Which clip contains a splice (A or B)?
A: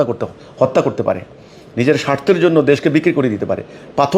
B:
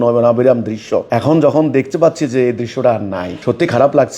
B